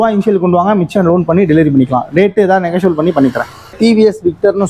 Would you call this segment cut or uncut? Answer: cut